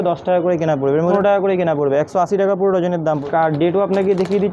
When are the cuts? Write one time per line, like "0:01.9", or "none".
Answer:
0:01.1
0:03.2